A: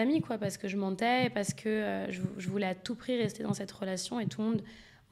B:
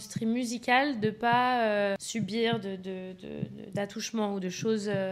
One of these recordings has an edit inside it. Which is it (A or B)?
B